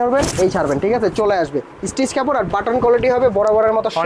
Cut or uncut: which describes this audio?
uncut